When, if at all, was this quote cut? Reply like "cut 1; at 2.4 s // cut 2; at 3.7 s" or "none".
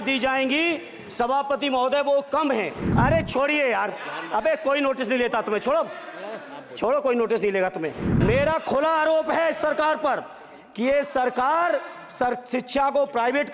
cut 1; at 2.8 s // cut 2; at 8.0 s